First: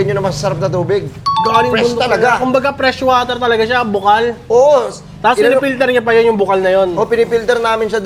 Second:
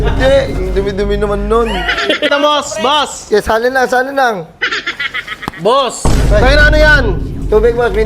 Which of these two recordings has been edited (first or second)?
second